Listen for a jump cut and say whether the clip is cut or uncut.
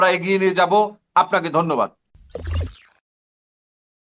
uncut